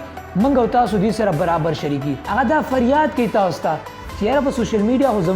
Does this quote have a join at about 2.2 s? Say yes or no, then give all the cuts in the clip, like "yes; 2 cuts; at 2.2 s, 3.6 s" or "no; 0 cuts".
yes; 1 cut; at 2.2 s